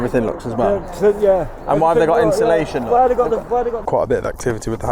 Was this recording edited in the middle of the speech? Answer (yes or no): yes